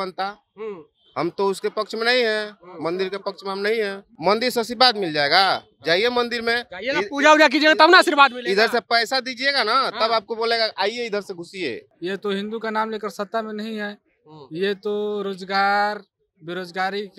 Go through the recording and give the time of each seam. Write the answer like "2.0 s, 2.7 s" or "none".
4.1 s, 11.9 s